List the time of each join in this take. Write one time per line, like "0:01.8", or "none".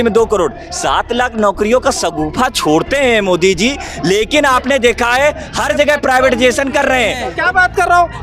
0:07.3